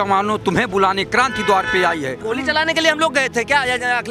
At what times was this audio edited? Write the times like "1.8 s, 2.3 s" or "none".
2.2 s

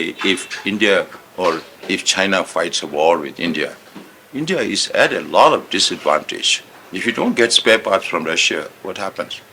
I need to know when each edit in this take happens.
none

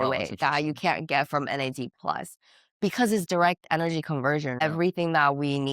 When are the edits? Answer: 4.6 s

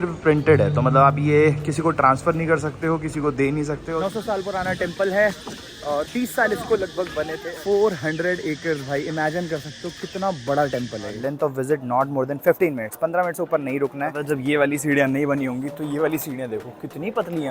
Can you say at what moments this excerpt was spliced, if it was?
3.8 s, 7.4 s, 11.1 s, 14.2 s

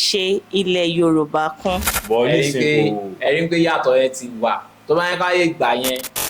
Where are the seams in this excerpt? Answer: 1.9 s

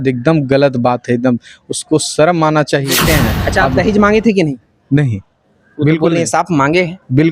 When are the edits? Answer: 2.9 s

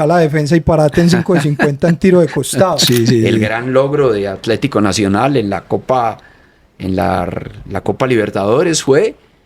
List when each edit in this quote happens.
2.8 s

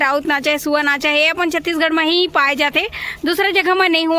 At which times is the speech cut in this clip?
none

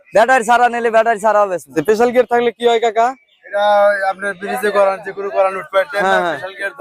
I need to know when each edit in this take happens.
1.8 s

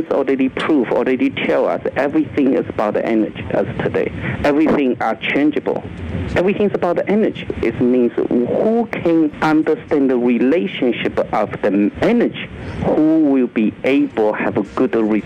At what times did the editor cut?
4.3 s, 7.5 s, 9.4 s, 12.0 s

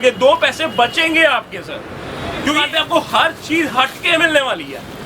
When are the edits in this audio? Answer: 2.5 s

